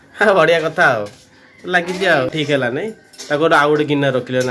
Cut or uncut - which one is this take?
cut